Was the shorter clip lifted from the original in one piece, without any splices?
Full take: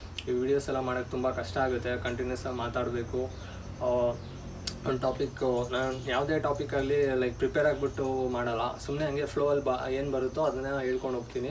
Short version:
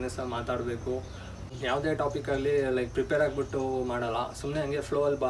no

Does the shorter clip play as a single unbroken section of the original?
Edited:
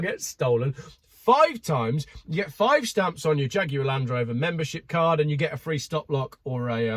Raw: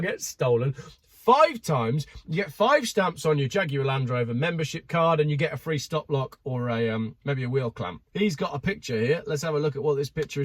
yes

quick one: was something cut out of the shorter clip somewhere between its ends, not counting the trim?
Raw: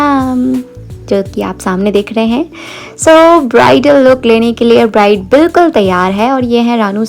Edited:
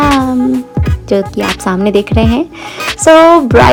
no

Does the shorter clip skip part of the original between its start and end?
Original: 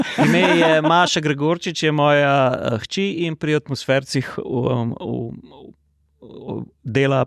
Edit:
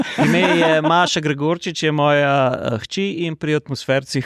no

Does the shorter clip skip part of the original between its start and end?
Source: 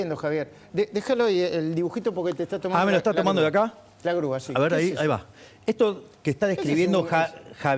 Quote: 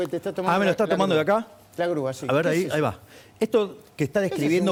no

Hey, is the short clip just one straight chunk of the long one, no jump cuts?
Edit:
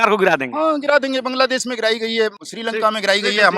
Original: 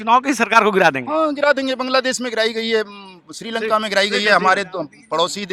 no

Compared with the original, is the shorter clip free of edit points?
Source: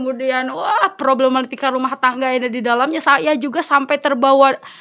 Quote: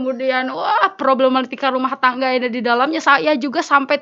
yes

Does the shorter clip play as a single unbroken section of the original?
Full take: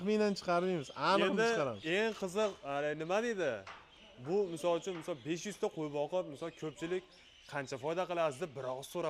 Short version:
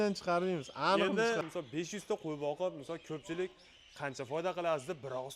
no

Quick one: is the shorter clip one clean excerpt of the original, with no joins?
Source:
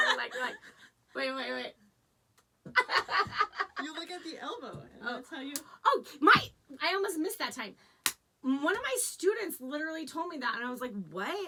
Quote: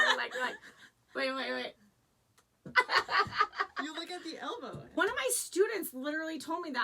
no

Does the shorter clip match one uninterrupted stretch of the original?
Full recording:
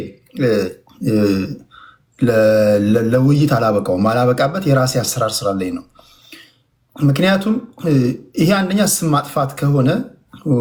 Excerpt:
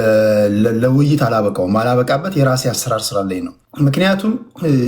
no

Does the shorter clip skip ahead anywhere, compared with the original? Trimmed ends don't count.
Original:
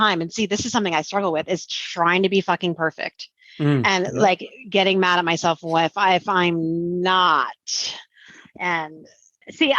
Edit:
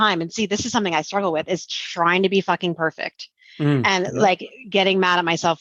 no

